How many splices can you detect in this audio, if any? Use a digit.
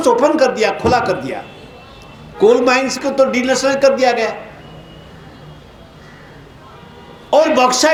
0